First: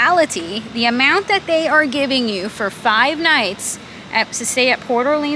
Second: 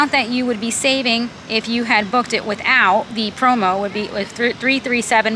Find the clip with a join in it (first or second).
second